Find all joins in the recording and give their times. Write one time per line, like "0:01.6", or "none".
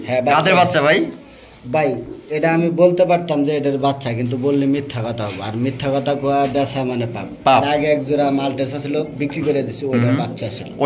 none

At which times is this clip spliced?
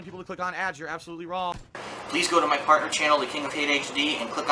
0:01.8

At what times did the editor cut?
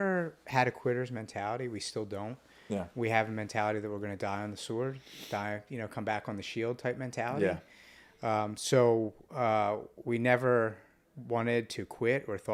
none

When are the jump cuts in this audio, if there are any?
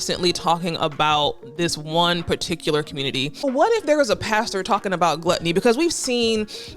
0:03.4

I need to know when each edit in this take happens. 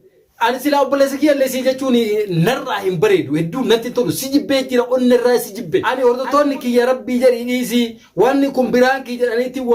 0:05.9

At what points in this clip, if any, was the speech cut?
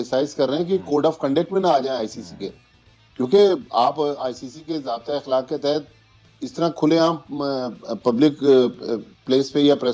none

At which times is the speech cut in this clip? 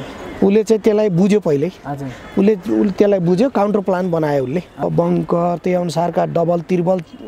0:04.8

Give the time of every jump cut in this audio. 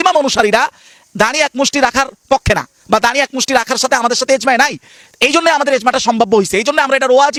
none

